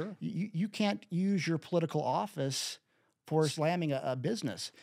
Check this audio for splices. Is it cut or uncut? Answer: cut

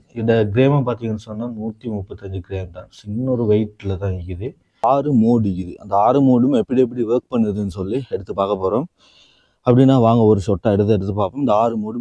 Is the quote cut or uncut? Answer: cut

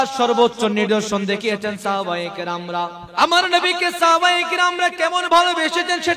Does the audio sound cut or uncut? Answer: cut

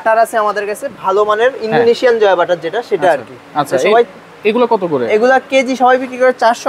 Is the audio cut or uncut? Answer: uncut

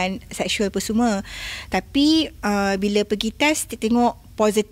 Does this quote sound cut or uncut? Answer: uncut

